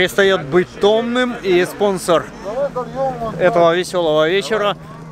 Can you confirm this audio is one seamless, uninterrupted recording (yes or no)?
yes